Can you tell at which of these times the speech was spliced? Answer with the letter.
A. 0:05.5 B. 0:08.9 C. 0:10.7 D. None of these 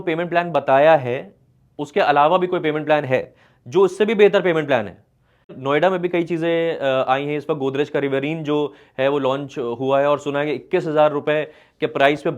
A